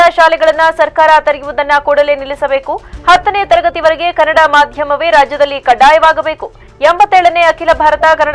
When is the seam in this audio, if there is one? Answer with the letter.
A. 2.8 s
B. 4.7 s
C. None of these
C